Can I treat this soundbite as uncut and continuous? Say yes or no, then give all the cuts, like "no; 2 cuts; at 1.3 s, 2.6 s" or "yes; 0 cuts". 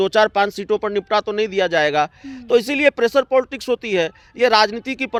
yes; 0 cuts